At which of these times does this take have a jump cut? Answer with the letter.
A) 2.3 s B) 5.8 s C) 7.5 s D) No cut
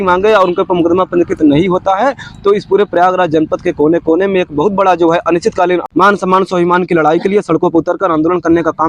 B